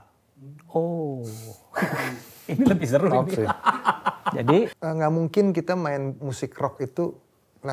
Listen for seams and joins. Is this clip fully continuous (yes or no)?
no